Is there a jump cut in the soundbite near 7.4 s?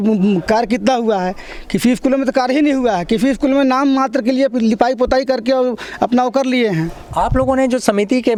no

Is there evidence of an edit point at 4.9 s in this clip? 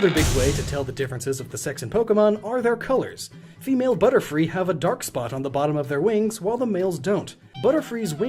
no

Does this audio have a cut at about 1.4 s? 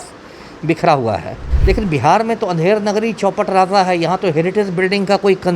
yes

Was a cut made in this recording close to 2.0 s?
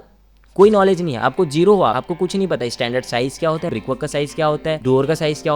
yes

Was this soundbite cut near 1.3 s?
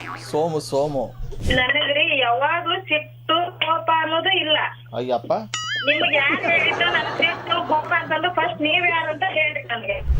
yes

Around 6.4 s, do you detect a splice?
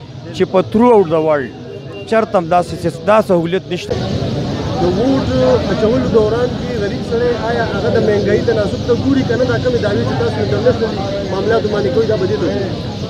no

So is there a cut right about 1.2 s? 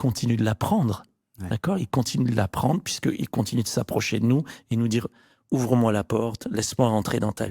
no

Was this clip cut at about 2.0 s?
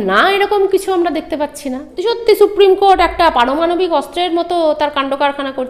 yes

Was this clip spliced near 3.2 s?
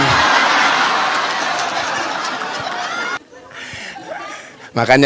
yes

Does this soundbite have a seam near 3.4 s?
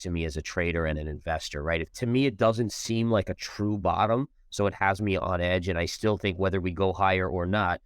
no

